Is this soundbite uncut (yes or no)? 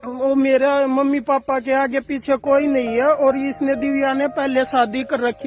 yes